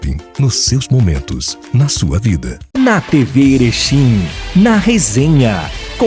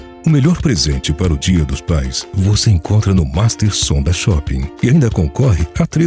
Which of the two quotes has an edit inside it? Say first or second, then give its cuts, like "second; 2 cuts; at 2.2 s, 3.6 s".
first; 1 cut; at 2.5 s